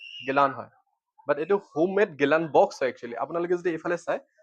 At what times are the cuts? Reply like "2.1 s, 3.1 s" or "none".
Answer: none